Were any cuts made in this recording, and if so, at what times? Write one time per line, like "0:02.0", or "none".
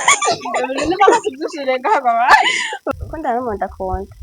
0:02.7